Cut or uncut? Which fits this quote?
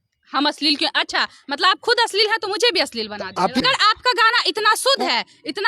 cut